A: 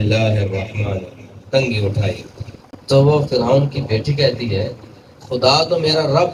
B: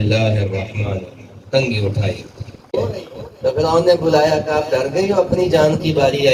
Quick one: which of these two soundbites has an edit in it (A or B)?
B